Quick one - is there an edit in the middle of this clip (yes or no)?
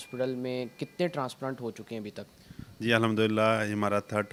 no